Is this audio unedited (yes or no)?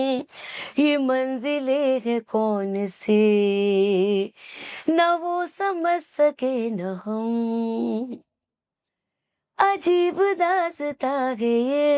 yes